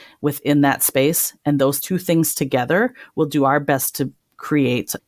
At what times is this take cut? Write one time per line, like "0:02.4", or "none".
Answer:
0:01.8